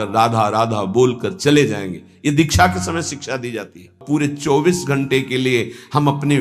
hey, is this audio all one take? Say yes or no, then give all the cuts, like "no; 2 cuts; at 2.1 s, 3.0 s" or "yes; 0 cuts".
no; 1 cut; at 4.0 s